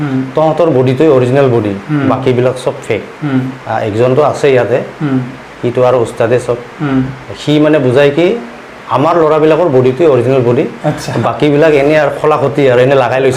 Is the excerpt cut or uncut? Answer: uncut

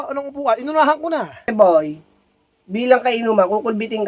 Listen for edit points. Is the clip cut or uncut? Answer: cut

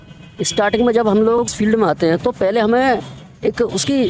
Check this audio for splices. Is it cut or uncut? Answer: cut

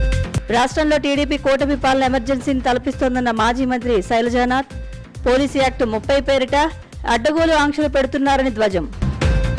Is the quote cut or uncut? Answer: uncut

